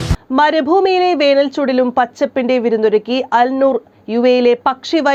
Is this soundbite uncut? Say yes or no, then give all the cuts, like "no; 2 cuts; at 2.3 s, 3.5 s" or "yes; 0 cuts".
yes; 0 cuts